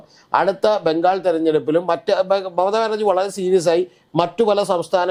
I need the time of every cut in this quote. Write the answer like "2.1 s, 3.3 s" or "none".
none